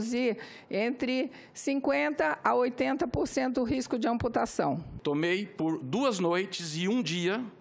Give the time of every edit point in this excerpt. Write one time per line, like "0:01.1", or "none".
0:04.9